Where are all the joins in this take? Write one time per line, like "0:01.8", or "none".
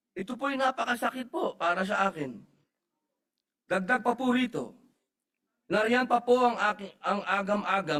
none